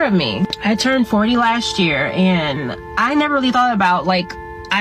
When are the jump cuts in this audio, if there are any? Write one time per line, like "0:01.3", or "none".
none